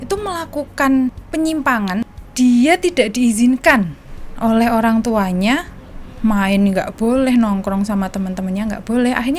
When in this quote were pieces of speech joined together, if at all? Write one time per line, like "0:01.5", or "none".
0:01.2
0:02.0